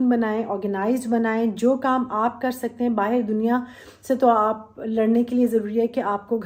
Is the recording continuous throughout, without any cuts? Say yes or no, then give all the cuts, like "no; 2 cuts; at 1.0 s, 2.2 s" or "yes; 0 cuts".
yes; 0 cuts